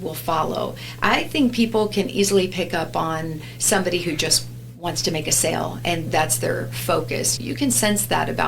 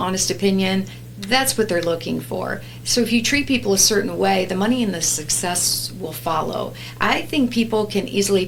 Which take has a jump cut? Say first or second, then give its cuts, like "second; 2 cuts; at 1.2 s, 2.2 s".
first; 2 cuts; at 6.0 s, 7.3 s